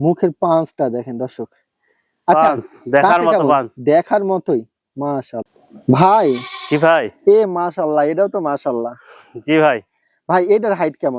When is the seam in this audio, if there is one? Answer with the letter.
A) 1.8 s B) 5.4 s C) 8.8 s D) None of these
B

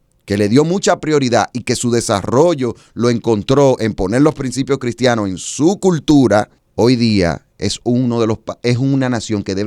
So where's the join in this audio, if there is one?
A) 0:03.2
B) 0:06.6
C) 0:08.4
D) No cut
B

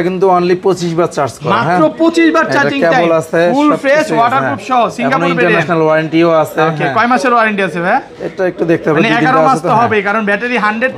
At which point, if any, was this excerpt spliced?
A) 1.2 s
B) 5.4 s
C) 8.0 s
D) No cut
D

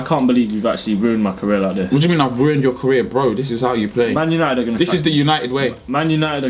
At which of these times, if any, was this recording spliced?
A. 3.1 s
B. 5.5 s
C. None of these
C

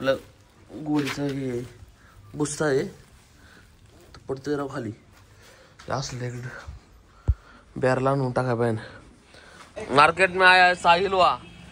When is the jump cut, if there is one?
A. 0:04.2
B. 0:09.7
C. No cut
B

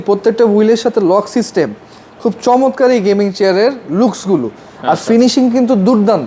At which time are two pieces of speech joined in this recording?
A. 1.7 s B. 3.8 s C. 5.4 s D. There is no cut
D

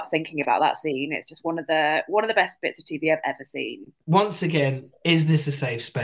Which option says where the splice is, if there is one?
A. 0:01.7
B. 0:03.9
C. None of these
B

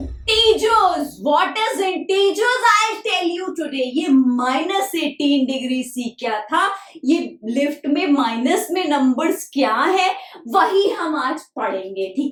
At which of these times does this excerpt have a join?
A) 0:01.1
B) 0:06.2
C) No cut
C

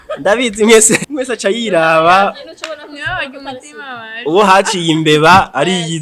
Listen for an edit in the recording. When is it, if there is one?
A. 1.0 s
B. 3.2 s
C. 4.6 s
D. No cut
A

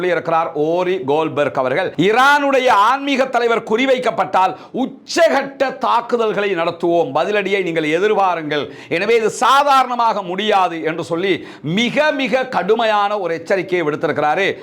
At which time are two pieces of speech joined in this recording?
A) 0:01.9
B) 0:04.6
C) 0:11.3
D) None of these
A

